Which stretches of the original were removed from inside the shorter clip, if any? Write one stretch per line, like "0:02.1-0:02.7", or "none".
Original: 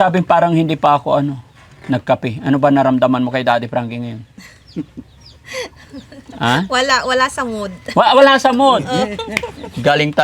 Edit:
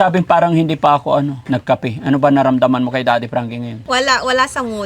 0:01.4-0:01.8
0:04.3-0:06.7